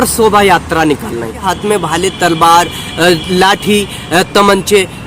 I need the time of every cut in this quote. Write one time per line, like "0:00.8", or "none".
0:01.5